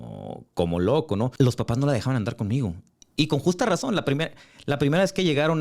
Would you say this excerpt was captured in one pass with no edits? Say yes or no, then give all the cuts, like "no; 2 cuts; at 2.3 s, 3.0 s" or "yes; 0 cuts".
no; 1 cut; at 1.3 s